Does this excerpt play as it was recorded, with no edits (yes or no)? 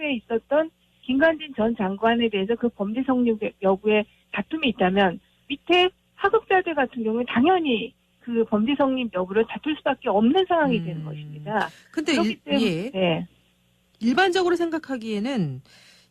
no